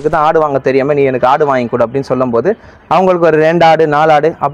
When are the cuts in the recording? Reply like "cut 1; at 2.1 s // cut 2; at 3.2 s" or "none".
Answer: none